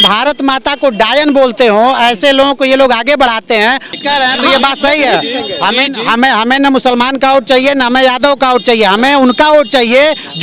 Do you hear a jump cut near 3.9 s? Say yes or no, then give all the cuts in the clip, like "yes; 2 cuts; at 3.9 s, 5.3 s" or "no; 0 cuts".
yes; 1 cut; at 3.9 s